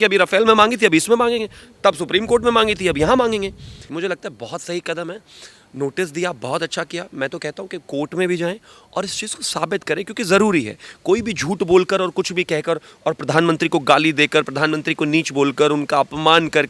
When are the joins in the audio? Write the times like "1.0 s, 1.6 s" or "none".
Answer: 3.8 s